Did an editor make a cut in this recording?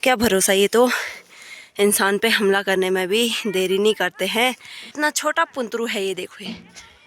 yes; 1 cut; at 4.9 s

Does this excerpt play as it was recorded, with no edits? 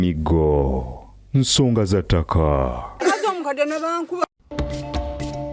no; 2 cuts; at 2.9 s, 4.2 s

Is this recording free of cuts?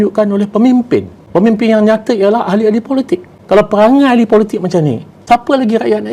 no; 3 cuts; at 1.2 s, 3.3 s, 5.1 s

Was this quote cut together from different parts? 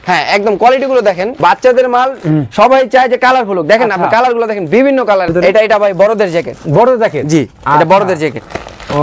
yes; 2 cuts; at 1.3 s, 5.3 s

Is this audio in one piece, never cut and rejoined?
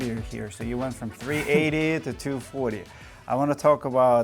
yes; 0 cuts

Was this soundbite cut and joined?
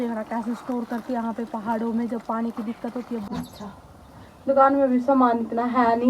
yes; 1 cut; at 3.3 s

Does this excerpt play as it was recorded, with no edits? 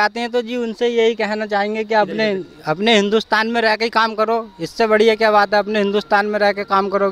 yes; 0 cuts

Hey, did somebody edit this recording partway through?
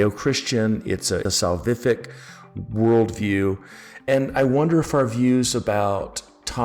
yes; 2 cuts; at 1.2 s, 4.0 s

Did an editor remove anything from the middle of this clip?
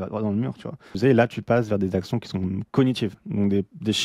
yes; 1 cut; at 1.0 s

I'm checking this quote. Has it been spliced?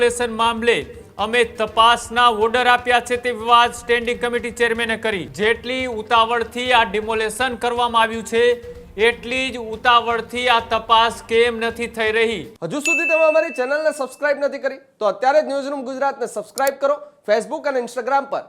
yes; 2 cuts; at 5.3 s, 12.5 s

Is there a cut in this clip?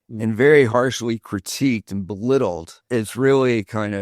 yes; 1 cut; at 2.7 s

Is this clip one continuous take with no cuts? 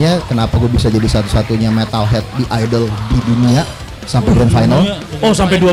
yes; 0 cuts

